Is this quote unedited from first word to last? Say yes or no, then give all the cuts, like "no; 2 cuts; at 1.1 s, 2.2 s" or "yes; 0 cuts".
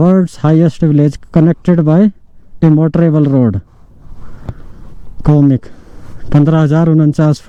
yes; 0 cuts